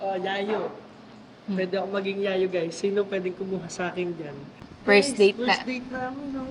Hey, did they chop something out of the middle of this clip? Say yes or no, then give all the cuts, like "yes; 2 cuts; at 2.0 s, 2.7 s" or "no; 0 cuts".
yes; 1 cut; at 4.6 s